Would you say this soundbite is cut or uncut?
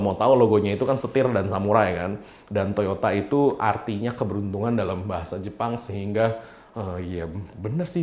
uncut